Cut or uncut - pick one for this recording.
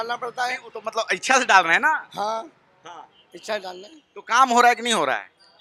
uncut